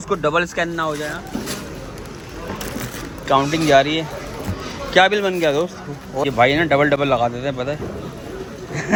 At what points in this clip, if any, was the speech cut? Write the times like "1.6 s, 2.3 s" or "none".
none

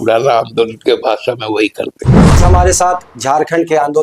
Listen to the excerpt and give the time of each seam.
2.4 s

